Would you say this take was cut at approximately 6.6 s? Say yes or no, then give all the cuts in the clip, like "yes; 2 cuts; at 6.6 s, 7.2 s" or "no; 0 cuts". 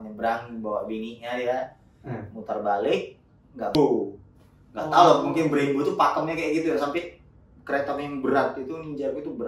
no; 1 cut; at 3.8 s